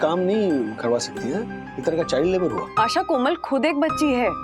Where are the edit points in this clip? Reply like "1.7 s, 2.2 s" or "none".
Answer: 2.6 s